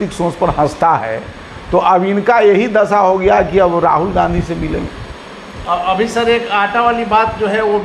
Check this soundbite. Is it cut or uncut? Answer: uncut